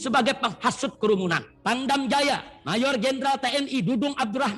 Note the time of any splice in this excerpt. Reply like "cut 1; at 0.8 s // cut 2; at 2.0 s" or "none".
cut 1; at 1.5 s